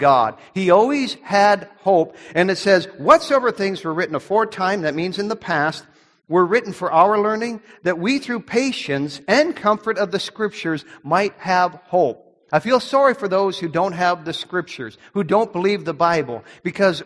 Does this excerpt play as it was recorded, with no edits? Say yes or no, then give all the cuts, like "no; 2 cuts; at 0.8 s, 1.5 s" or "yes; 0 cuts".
yes; 0 cuts